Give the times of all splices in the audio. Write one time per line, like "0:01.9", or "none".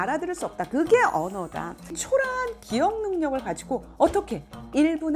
0:02.0

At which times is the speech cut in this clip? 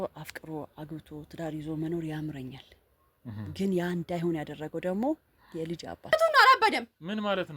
0:06.1

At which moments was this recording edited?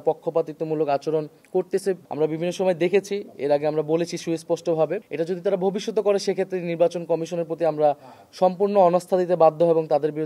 none

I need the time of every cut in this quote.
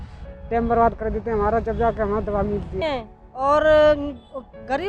0:02.8

